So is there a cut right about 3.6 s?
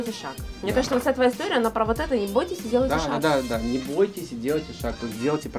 no; 0 cuts

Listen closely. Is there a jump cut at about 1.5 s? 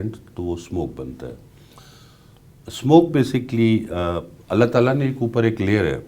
no; 0 cuts

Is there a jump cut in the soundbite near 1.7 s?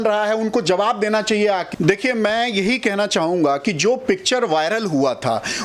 yes; 1 cut; at 1.7 s

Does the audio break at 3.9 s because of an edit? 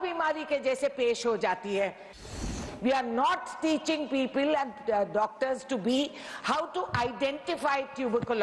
no; 1 cut; at 2.4 s

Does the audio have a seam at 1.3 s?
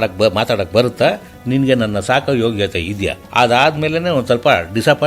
no; 1 cut; at 3.2 s

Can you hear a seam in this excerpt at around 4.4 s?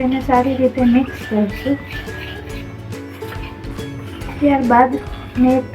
yes; 2 cuts; at 1.8 s, 4.4 s

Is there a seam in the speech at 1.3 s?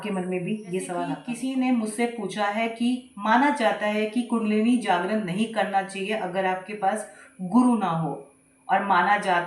yes; 1 cut; at 1.3 s

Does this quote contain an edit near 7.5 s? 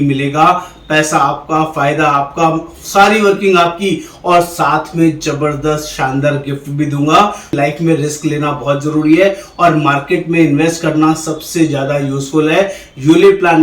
yes; 1 cut; at 7.5 s

